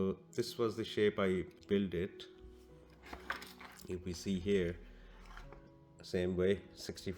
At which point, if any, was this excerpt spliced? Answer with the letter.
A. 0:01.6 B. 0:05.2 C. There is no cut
A